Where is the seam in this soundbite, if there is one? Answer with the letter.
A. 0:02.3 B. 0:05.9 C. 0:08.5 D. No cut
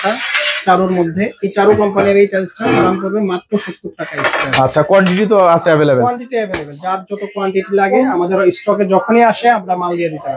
D